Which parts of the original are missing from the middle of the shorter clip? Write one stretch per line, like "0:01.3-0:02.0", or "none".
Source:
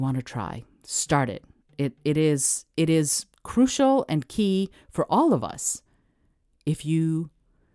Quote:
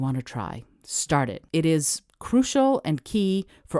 0:01.4-0:02.6